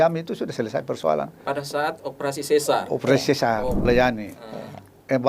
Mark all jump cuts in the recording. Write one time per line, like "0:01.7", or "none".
0:03.9